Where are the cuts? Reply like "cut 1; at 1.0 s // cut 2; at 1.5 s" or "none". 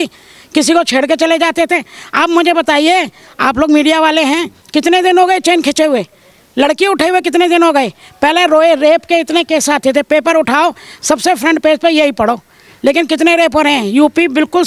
none